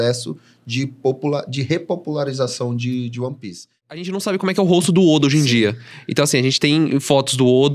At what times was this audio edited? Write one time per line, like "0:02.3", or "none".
0:04.1